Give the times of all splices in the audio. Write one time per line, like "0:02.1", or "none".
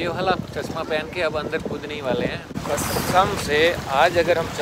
0:02.5